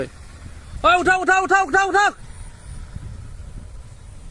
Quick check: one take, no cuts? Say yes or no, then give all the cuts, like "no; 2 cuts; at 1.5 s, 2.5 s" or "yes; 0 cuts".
yes; 0 cuts